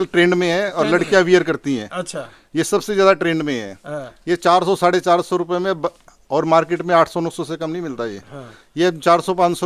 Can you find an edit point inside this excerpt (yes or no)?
no